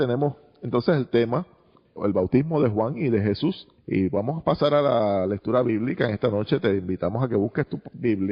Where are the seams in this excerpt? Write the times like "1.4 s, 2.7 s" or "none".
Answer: 4.8 s

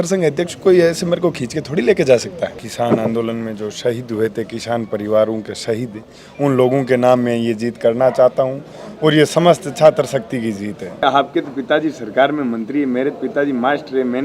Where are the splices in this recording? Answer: 2.6 s, 11.0 s

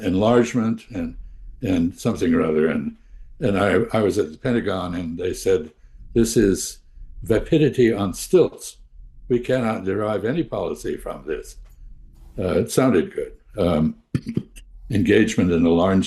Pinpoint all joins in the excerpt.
none

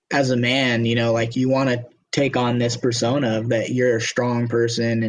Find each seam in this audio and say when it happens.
1.3 s

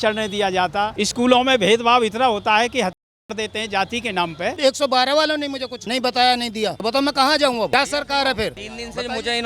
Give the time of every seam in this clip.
4.5 s

